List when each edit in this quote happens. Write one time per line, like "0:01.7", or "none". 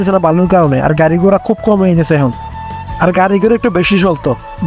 none